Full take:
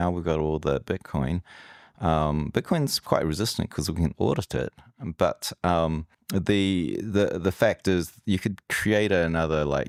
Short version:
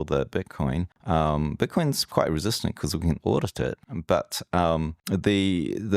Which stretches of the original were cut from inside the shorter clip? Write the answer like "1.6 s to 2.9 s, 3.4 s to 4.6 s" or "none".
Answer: 1.5 s to 1.9 s, 4.8 s to 5.0 s, 6.1 s to 6.2 s